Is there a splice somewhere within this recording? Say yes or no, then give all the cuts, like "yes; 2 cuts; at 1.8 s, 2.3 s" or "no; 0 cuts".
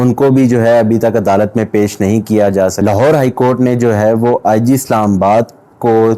yes; 1 cut; at 2.8 s